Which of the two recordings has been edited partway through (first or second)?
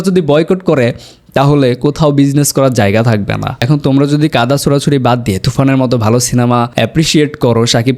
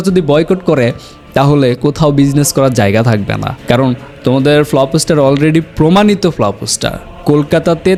first